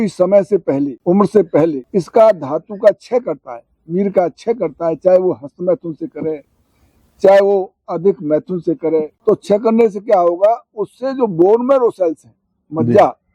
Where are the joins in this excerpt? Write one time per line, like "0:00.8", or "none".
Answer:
0:00.9
0:01.8
0:09.1